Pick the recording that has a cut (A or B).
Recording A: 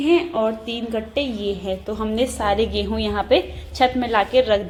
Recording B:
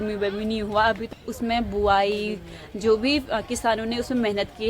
B